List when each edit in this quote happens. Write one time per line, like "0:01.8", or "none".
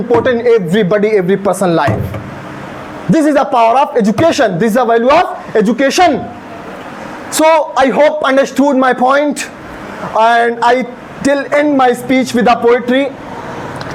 none

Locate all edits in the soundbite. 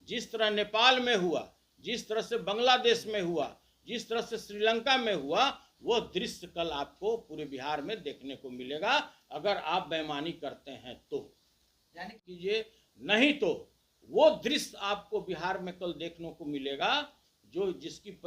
0:12.3

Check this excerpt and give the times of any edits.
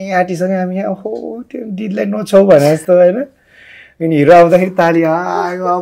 none

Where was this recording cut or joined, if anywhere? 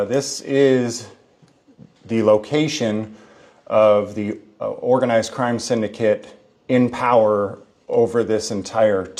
none

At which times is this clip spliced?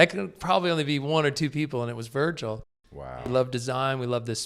0:03.1

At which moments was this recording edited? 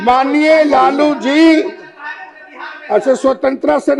none

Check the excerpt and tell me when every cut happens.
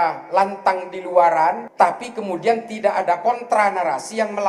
0:01.7

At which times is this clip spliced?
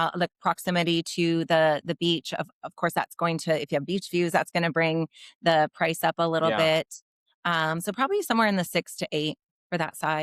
none

